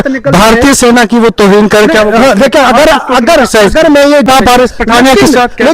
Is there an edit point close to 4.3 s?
yes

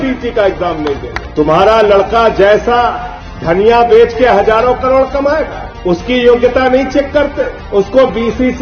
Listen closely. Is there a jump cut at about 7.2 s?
no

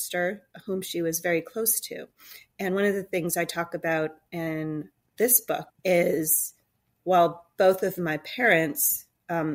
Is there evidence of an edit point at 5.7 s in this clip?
yes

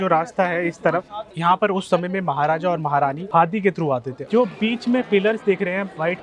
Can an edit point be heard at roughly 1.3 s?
no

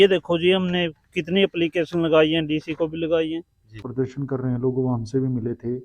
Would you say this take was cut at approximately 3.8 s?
yes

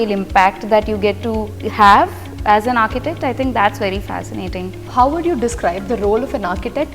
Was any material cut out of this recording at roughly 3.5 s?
no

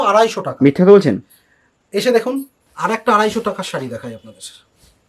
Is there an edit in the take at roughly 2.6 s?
yes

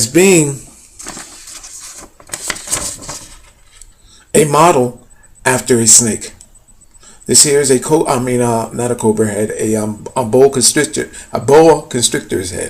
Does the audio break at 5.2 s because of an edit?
yes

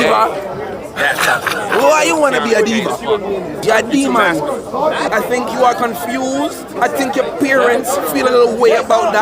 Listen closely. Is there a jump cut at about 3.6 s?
yes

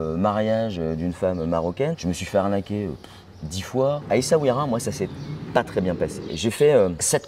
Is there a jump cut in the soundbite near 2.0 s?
yes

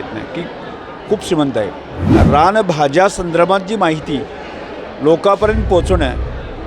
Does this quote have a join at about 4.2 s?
no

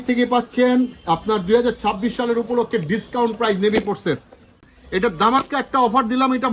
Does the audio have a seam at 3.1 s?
no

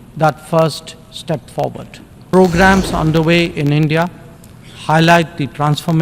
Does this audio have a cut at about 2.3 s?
yes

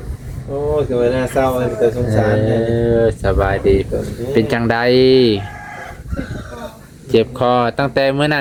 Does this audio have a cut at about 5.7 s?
no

